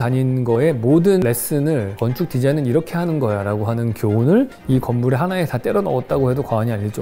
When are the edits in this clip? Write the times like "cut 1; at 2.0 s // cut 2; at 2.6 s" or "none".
cut 1; at 1.2 s // cut 2; at 4.6 s